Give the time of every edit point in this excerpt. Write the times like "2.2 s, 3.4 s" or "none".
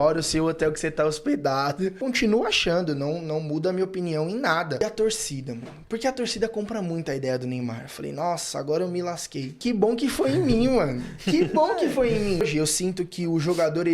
2.0 s, 4.8 s, 9.6 s, 12.4 s